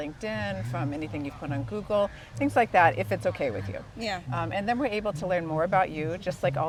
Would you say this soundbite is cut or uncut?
uncut